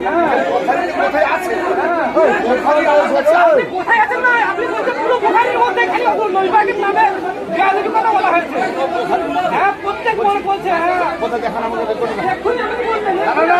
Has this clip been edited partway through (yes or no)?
no